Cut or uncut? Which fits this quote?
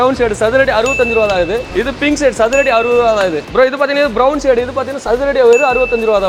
uncut